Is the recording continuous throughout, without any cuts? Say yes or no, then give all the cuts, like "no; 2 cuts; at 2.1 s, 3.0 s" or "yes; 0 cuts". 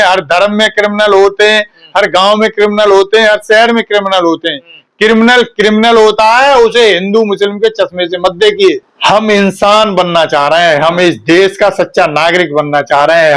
no; 1 cut; at 8.8 s